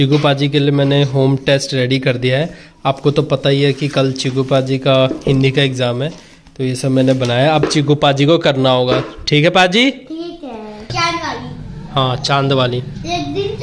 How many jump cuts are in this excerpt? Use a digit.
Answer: 1